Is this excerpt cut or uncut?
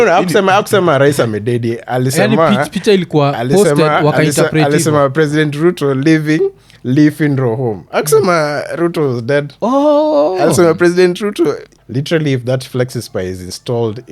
cut